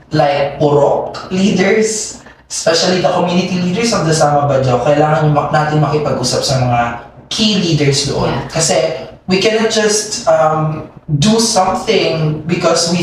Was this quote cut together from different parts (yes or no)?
no